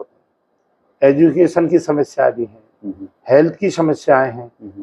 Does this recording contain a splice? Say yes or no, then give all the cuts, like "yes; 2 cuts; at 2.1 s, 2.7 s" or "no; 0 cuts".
no; 0 cuts